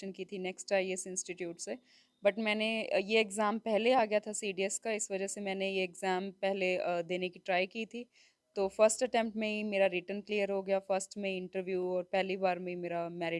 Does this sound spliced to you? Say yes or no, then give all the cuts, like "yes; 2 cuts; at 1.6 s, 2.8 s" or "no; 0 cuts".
no; 0 cuts